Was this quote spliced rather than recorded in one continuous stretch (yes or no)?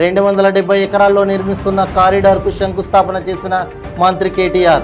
no